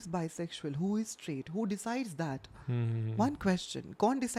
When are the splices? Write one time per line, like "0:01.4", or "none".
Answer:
none